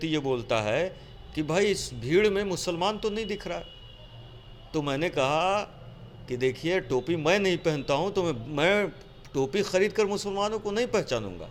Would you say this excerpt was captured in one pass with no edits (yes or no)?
yes